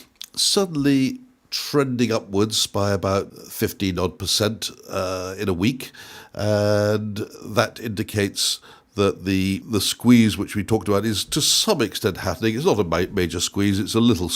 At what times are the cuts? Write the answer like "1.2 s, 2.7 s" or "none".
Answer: 3.3 s, 9.6 s